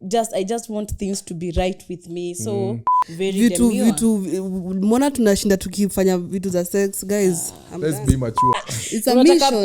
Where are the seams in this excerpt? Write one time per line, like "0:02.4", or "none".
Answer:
0:03.0
0:08.5